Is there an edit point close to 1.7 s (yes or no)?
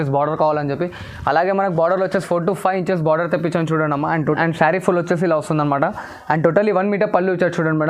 no